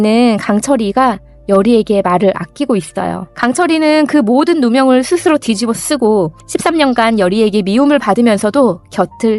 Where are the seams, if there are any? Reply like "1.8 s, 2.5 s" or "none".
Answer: 3.3 s